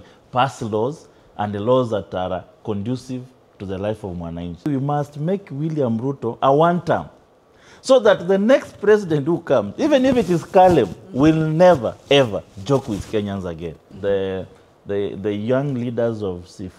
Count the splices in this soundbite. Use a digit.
2